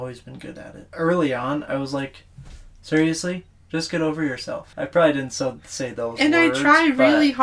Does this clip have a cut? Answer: yes; 2 cuts; at 0.9 s, 4.7 s

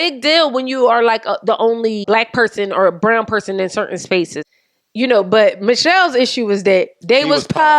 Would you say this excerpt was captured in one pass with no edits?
no; 2 cuts; at 2.0 s, 4.4 s

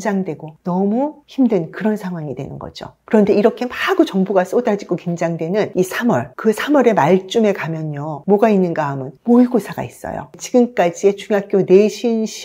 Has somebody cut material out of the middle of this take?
no; 0 cuts

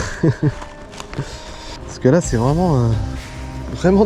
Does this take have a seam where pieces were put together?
yes; 1 cut; at 2.0 s

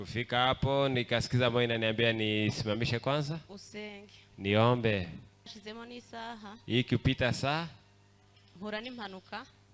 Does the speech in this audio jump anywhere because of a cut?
yes; 1 cut; at 5.6 s

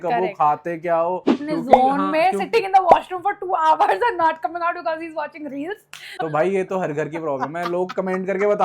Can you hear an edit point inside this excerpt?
yes; 2 cuts; at 1.4 s, 6.0 s

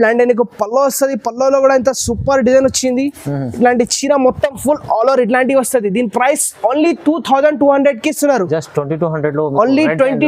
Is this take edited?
no; 0 cuts

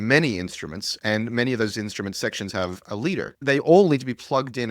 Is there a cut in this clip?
yes; 1 cut; at 3.4 s

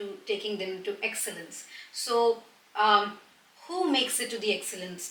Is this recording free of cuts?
yes; 0 cuts

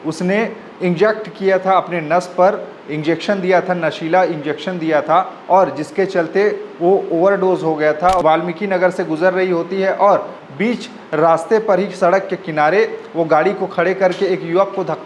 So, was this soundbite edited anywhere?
yes; 1 cut; at 8.2 s

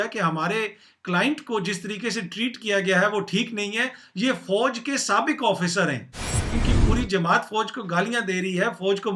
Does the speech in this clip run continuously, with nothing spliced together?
no; 1 cut; at 6.6 s

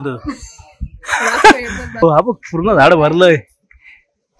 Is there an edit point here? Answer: yes; 1 cut; at 2.0 s

